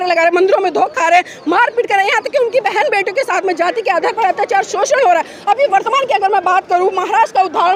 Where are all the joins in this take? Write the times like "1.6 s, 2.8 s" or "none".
none